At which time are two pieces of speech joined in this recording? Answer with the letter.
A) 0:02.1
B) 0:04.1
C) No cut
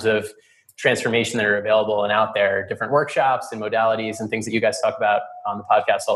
C